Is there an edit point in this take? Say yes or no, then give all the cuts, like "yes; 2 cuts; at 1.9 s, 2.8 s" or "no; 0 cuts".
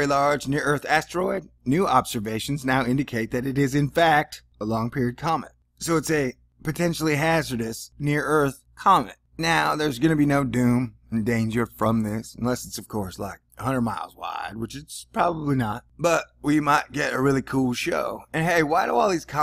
no; 0 cuts